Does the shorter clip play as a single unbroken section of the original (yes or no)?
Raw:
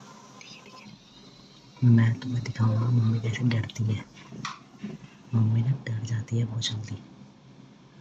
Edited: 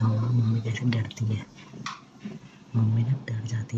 yes